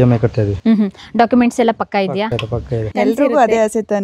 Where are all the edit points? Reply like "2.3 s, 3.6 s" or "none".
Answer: 2.8 s